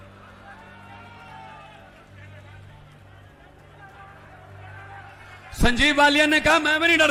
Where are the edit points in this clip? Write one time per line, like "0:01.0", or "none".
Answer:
none